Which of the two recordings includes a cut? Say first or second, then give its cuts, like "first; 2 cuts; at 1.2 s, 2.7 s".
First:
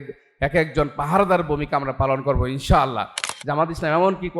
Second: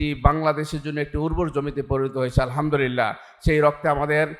first; 1 cut; at 3.2 s